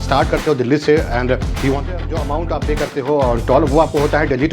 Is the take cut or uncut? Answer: cut